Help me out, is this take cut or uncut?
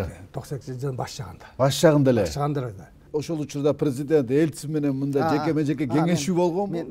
cut